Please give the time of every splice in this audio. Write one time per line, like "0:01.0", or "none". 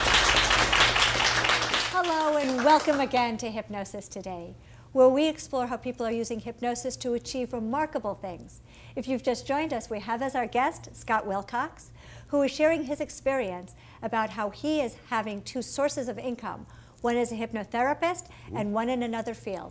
none